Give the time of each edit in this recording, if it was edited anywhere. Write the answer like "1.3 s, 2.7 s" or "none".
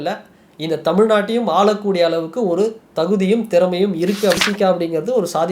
4.4 s